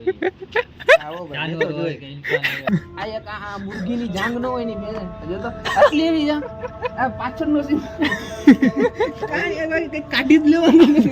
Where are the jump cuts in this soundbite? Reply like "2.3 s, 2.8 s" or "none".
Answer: 2.7 s